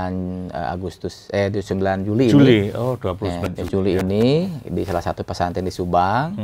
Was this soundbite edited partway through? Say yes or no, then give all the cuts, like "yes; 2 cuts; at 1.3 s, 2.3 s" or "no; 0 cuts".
no; 0 cuts